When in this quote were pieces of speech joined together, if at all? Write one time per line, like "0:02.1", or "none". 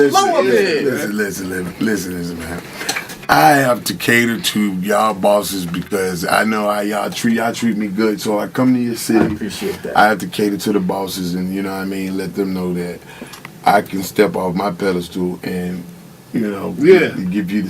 0:04.0

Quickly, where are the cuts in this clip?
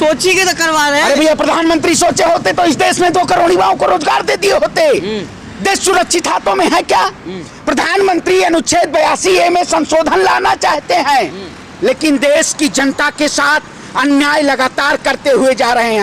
none

